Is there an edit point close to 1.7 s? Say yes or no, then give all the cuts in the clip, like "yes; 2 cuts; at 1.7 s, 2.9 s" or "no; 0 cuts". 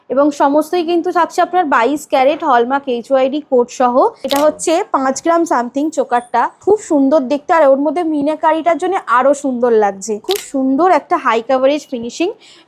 no; 3 cuts; at 4.2 s, 6.6 s, 10.2 s